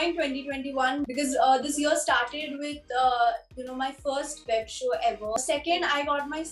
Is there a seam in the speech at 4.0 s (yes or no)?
no